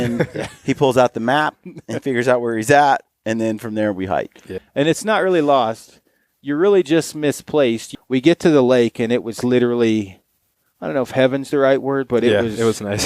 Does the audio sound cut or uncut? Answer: cut